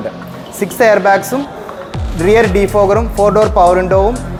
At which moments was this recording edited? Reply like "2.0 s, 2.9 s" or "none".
none